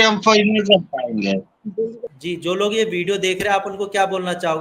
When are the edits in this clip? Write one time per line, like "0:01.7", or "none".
0:02.1